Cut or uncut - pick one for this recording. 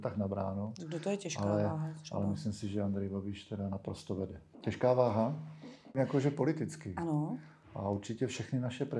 cut